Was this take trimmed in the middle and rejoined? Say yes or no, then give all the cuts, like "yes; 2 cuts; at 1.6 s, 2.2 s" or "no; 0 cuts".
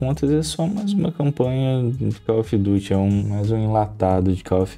yes; 1 cut; at 3.2 s